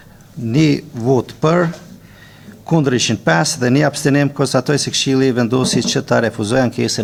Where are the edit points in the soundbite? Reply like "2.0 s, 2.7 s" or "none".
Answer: none